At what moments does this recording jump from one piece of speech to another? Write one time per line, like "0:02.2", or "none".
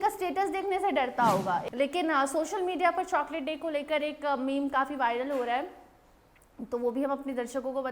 0:01.7